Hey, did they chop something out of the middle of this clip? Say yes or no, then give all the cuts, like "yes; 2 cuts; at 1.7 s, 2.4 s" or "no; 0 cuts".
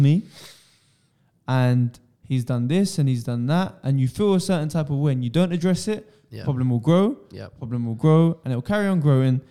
no; 0 cuts